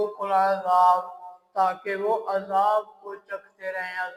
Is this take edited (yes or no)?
no